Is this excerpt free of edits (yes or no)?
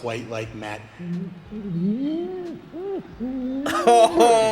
yes